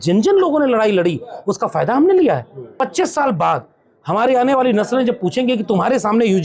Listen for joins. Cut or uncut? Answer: cut